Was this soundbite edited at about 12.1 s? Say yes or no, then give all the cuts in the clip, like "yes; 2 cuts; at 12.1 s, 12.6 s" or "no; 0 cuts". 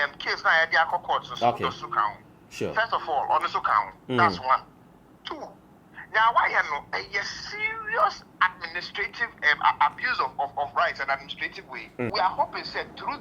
yes; 1 cut; at 12.1 s